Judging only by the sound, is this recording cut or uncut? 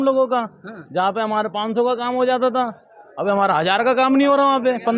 uncut